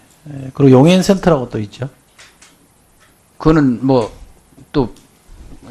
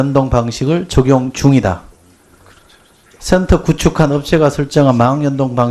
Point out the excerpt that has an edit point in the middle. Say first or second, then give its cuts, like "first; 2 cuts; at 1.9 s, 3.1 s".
second; 1 cut; at 1.6 s